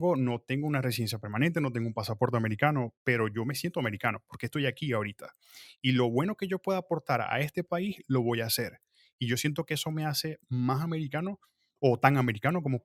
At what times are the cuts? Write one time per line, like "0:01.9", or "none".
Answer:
none